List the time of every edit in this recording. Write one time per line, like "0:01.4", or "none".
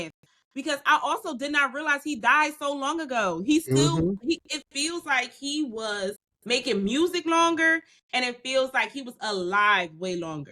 0:06.3

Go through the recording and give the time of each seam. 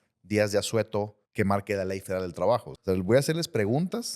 0:01.2
0:02.7

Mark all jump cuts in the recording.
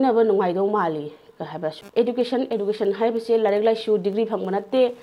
0:01.8

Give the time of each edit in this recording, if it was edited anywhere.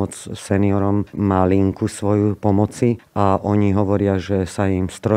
0:01.1
0:02.5

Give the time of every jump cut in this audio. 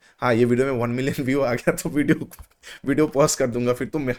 none

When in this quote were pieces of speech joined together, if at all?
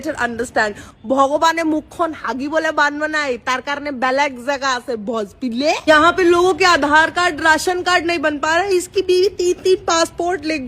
0:05.8

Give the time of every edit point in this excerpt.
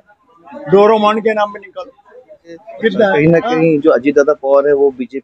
0:03.1

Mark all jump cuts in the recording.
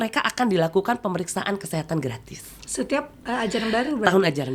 none

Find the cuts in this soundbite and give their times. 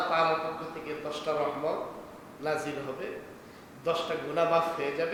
none

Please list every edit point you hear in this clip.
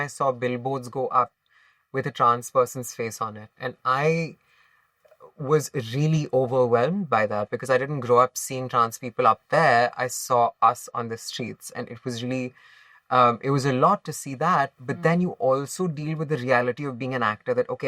none

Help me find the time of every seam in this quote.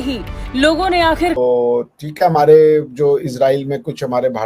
0:01.4

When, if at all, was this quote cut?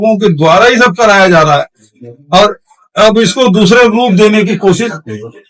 none

